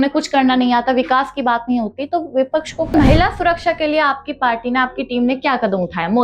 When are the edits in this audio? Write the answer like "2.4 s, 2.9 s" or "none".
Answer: 2.9 s

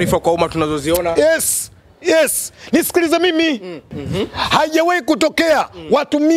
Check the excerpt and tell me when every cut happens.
4.0 s

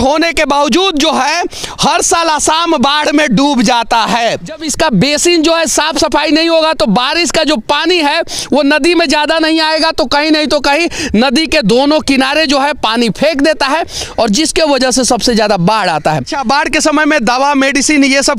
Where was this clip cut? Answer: 4.7 s, 16.3 s

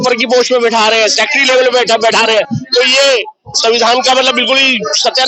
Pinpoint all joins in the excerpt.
none

